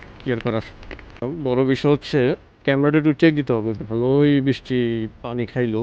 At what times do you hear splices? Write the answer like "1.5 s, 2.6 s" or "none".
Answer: 1.2 s, 2.5 s